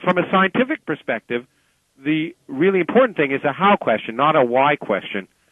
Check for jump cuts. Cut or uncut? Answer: uncut